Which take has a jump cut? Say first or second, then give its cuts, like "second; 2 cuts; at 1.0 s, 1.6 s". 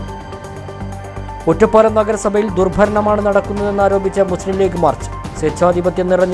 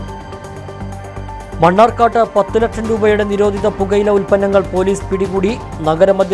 first; 1 cut; at 1.2 s